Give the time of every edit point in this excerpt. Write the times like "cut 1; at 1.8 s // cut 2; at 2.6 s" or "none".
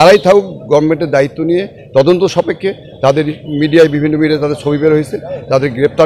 none